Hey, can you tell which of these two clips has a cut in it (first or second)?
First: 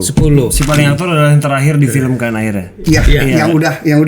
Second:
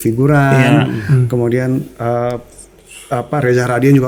first